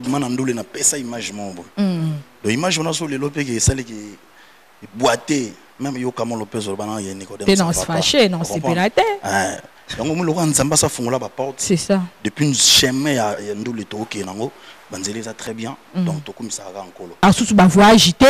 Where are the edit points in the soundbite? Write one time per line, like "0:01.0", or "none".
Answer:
0:17.2